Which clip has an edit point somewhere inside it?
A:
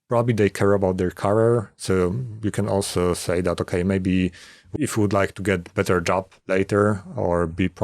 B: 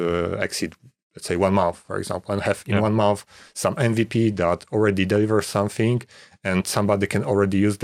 A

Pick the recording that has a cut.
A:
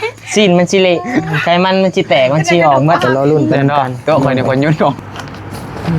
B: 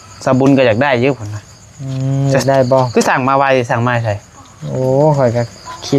A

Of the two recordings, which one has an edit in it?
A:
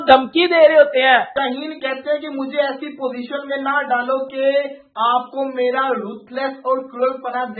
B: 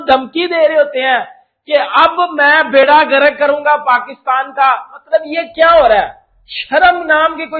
A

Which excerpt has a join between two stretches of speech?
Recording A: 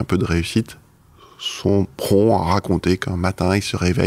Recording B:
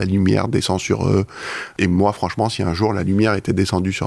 B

